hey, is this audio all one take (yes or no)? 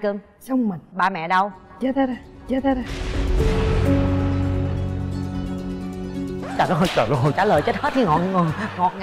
yes